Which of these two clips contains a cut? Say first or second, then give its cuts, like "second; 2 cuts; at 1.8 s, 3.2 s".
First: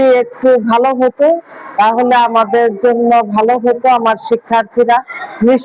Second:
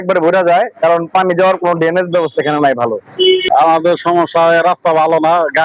second; 1 cut; at 3.4 s